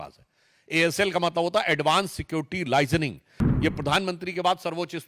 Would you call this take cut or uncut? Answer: cut